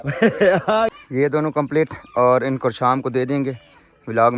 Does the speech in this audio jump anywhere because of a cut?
yes; 1 cut; at 0.9 s

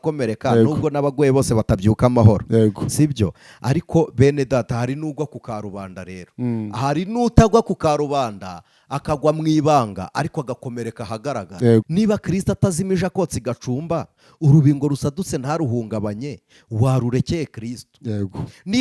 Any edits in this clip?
yes; 1 cut; at 11.9 s

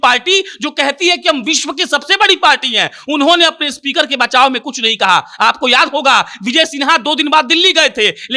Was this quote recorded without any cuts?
yes; 0 cuts

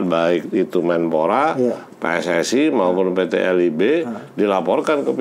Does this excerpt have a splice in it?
no; 0 cuts

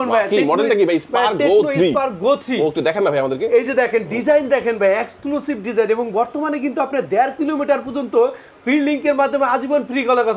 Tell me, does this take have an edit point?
no; 0 cuts

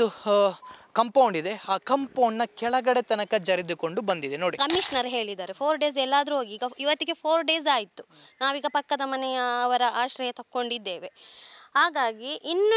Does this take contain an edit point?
yes; 1 cut; at 4.6 s

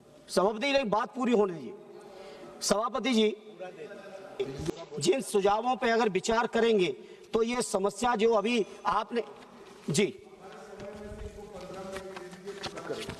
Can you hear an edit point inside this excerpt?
yes; 1 cut; at 4.7 s

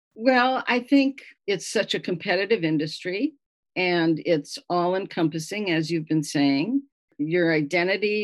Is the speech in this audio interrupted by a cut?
yes; 1 cut; at 1.3 s

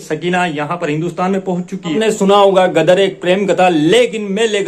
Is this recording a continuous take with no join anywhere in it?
no; 1 cut; at 1.9 s

